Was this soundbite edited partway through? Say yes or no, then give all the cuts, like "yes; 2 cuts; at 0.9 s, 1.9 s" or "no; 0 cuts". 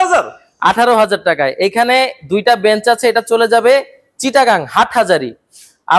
no; 0 cuts